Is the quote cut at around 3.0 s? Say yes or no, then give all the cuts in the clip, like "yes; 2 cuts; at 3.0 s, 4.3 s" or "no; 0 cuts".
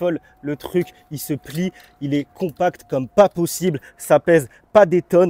no; 0 cuts